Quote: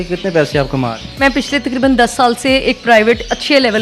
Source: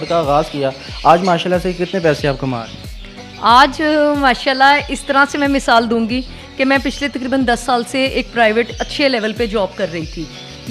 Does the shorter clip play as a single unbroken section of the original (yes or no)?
no